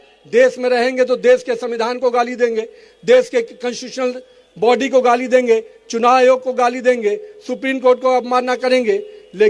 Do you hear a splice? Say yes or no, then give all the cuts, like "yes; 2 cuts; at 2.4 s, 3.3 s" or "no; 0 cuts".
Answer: no; 0 cuts